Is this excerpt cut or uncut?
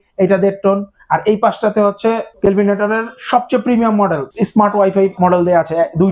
cut